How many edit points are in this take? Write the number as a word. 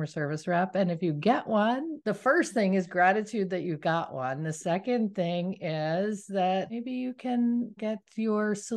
three